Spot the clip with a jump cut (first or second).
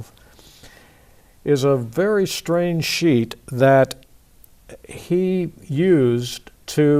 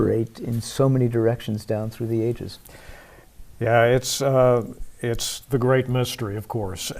second